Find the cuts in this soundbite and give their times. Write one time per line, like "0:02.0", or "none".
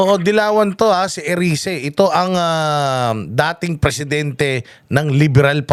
none